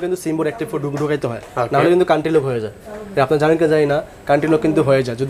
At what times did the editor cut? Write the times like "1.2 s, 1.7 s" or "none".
none